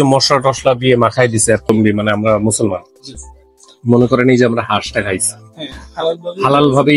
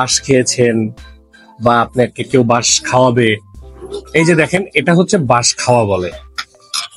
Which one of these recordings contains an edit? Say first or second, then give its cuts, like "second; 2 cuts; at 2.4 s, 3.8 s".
first; 1 cut; at 2.2 s